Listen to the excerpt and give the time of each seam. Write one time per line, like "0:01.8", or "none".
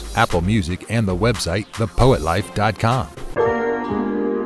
0:03.2